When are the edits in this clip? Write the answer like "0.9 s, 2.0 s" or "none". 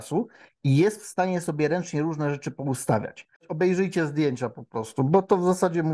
3.5 s